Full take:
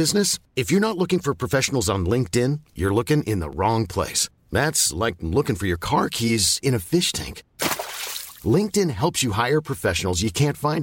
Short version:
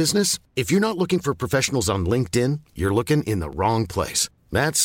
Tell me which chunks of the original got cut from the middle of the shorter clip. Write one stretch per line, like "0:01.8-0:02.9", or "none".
none